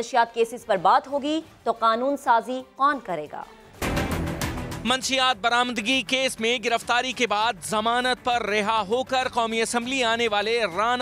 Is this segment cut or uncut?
cut